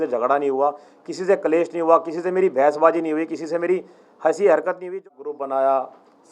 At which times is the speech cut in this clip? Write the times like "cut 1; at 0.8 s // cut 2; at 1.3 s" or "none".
cut 1; at 5.1 s